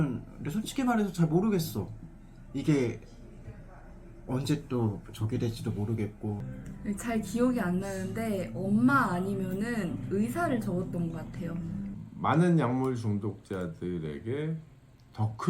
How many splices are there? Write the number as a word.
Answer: two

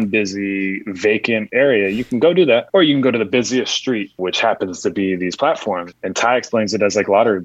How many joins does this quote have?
four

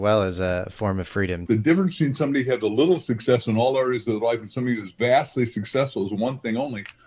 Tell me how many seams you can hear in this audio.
one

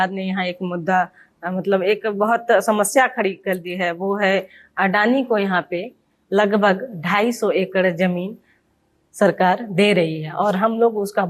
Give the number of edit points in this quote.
zero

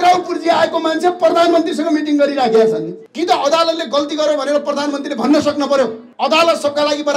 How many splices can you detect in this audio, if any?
two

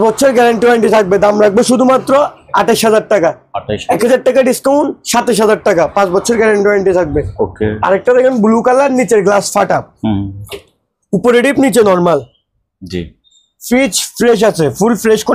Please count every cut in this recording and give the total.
zero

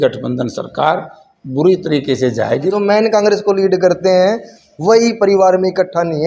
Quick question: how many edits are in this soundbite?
one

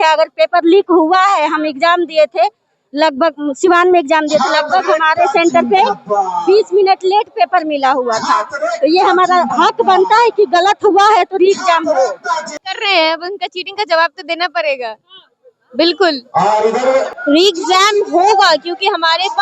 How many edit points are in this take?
two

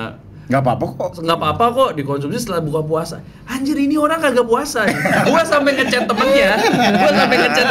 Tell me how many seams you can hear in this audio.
one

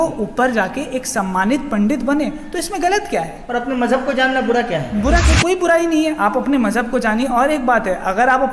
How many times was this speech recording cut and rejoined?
one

